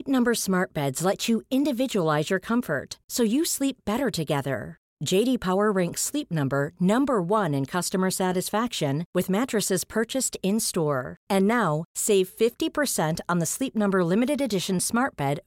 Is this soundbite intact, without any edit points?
yes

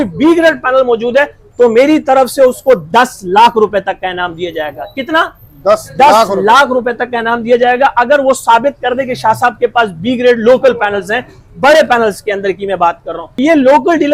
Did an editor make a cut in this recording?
no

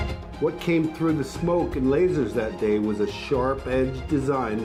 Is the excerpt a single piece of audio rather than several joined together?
yes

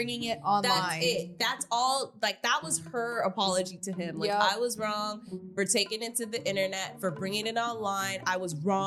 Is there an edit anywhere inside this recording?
no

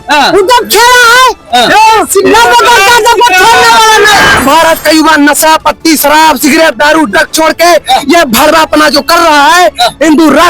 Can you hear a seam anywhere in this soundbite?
yes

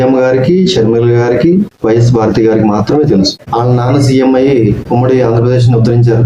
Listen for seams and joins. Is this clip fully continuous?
no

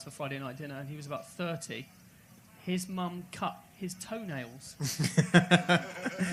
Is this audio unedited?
no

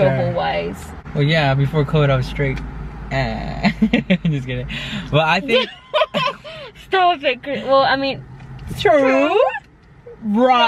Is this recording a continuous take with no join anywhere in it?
yes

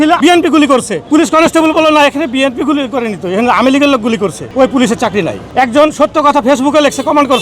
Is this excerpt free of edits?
yes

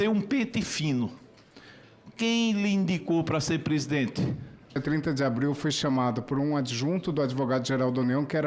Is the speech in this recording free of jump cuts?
no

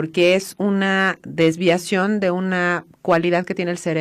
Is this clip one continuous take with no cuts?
no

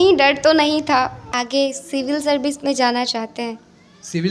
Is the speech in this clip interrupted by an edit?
yes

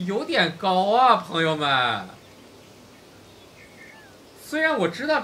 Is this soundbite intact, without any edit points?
no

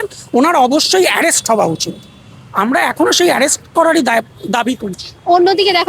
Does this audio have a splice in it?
no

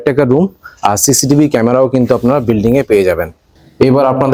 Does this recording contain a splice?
no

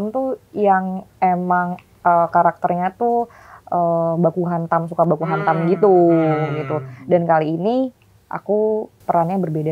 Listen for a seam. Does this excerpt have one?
no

